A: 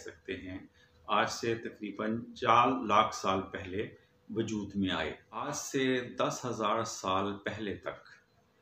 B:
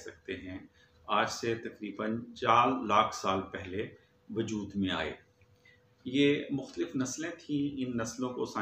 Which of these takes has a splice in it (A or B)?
A